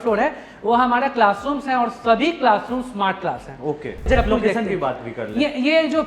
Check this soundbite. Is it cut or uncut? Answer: uncut